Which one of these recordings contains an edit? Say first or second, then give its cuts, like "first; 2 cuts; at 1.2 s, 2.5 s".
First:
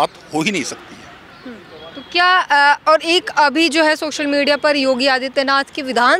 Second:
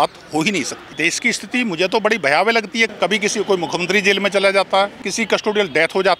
second; 3 cuts; at 0.9 s, 2.9 s, 5.1 s